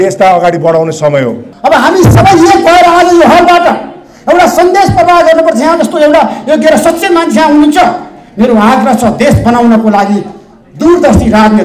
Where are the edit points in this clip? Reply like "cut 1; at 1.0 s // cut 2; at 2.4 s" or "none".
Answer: cut 1; at 1.4 s